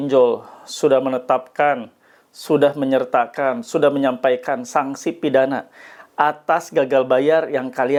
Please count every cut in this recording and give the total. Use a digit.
0